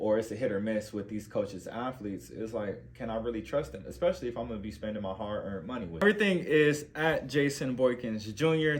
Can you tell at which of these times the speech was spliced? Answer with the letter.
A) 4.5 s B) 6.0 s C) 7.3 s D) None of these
B